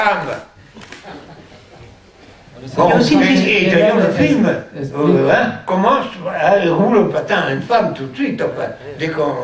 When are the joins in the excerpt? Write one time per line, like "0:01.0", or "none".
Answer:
0:07.8